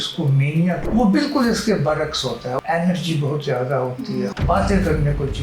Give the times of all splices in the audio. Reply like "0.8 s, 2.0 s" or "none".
0.8 s, 2.6 s, 4.3 s